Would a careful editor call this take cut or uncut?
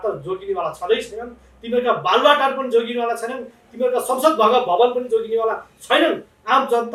uncut